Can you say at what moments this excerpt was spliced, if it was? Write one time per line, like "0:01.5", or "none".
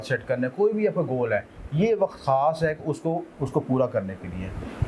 none